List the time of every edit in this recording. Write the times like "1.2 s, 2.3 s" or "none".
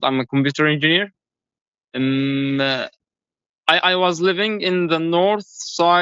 none